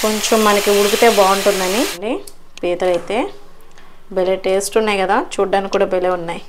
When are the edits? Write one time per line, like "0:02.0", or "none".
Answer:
0:01.9